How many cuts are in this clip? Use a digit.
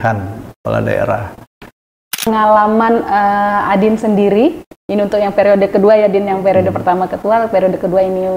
1